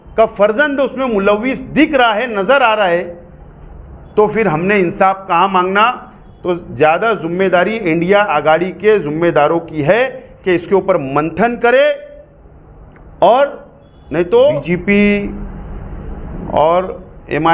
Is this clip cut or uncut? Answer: cut